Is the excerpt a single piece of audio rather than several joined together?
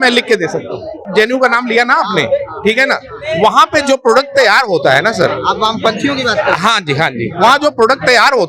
no; 1 cut; at 1.0 s

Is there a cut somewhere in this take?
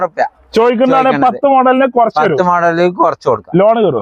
no; 0 cuts

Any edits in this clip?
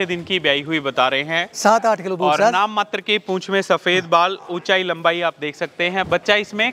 no; 0 cuts

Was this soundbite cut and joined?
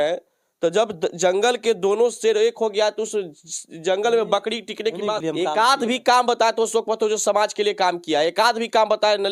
yes; 1 cut; at 5.2 s

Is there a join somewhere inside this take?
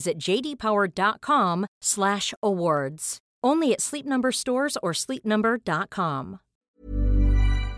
yes; 1 cut; at 6.6 s

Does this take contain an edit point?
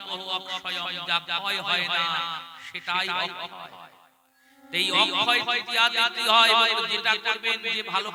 no; 0 cuts

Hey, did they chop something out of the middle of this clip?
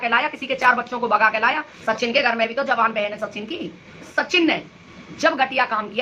yes; 2 cuts; at 1.7 s, 4.1 s

